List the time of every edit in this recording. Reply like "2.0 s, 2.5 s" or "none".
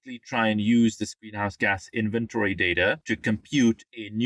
3.0 s